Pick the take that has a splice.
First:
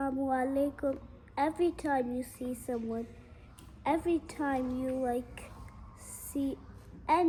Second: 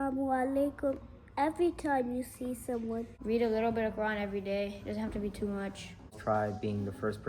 second; 2 cuts; at 3.1 s, 6.2 s

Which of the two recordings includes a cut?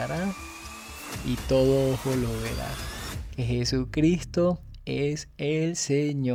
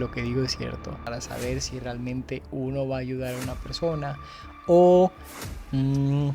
second; 1 cut; at 1.0 s

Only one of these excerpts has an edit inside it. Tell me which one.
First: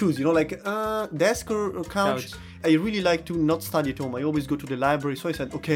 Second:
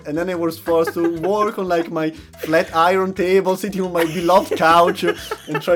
first; 1 cut; at 2.6 s

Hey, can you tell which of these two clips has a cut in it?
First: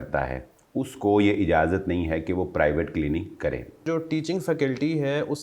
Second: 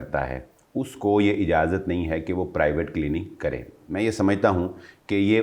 first; 1 cut; at 3.8 s

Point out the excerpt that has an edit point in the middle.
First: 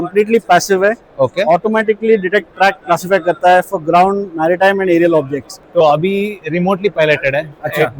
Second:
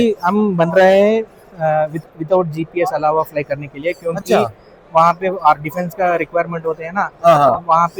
first; 1 cut; at 5.6 s

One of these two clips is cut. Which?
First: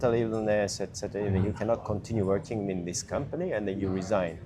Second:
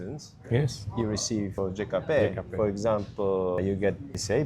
second; 1 cut; at 1.6 s

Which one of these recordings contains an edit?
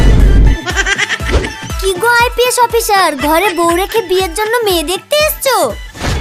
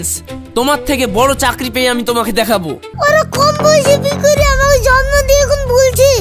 second; 1 cut; at 2.9 s

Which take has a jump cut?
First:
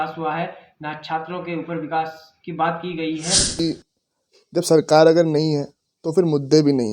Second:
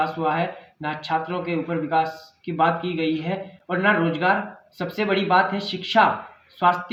first; 1 cut; at 3.6 s

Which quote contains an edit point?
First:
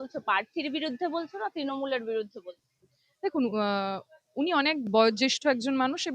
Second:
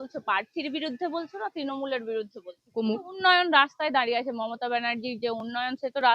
second; 1 cut; at 2.7 s

